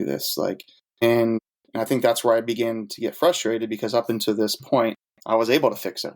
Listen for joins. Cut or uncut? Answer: cut